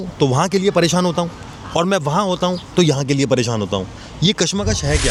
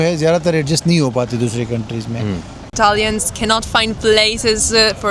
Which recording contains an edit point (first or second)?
second